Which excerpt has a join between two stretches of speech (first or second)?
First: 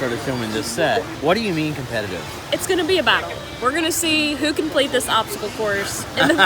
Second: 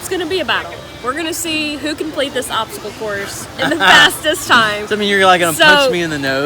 first